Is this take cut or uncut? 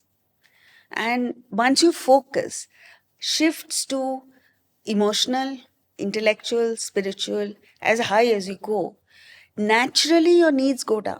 uncut